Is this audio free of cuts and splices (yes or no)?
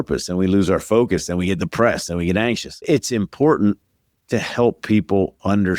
no